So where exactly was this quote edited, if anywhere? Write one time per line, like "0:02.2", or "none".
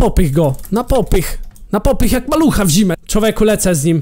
0:03.0